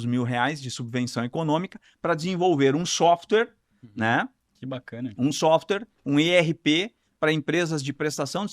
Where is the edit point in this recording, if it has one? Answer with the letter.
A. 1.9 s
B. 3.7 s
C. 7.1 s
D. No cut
D